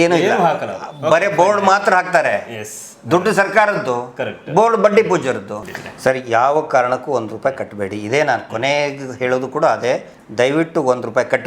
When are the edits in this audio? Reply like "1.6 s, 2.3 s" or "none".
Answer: 5.5 s